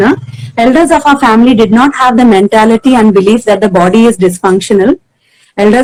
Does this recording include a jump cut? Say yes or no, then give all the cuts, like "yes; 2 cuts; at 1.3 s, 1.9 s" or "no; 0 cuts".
no; 0 cuts